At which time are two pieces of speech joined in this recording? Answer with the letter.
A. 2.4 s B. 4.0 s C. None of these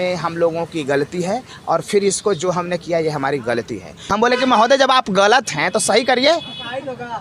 B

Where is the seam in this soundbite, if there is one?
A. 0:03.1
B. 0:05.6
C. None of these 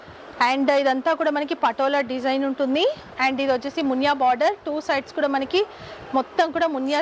A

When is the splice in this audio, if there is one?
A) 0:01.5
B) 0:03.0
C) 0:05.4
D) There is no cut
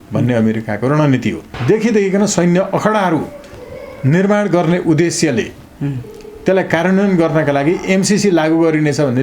A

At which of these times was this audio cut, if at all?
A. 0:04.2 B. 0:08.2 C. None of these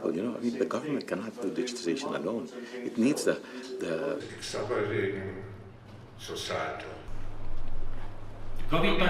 A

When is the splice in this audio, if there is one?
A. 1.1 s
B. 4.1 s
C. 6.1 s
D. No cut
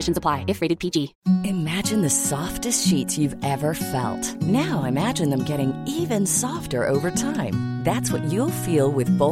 A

